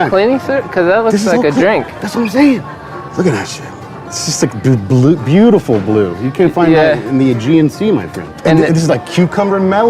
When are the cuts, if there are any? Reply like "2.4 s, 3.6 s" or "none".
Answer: 2.7 s, 8.2 s